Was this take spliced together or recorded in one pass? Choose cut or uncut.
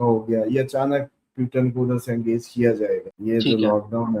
cut